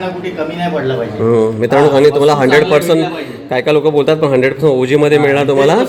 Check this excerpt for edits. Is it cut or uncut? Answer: uncut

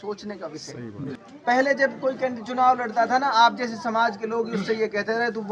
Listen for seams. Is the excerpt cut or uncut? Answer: cut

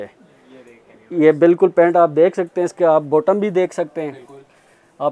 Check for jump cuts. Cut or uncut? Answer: uncut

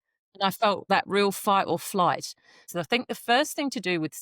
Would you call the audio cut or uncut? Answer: cut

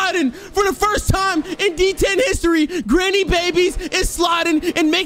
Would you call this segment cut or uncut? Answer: uncut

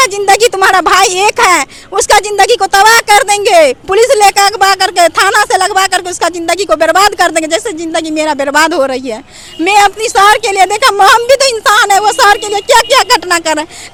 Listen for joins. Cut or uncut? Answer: uncut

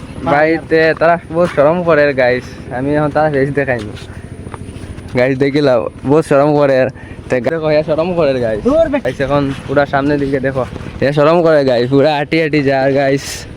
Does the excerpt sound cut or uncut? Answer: cut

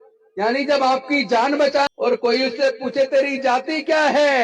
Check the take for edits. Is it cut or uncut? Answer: cut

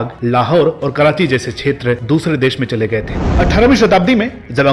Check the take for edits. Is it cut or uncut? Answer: cut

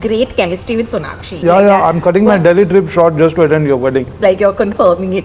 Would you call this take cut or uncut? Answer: cut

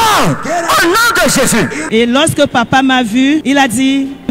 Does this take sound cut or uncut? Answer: uncut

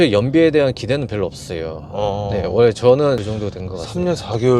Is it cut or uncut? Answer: cut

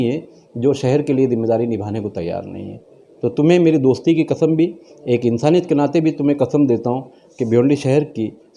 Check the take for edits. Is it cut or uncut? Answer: uncut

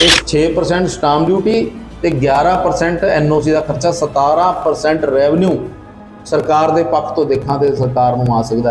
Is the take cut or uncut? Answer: uncut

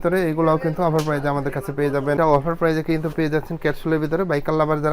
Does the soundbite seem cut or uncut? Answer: cut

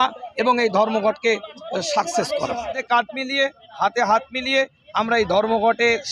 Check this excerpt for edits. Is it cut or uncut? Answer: cut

